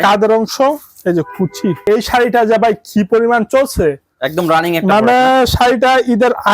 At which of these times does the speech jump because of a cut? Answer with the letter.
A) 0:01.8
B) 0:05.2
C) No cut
A